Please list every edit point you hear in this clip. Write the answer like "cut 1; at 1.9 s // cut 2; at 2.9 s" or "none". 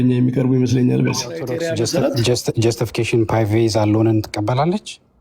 cut 1; at 1.5 s